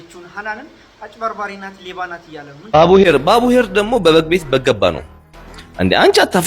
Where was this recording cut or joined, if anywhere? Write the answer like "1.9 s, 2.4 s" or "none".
2.6 s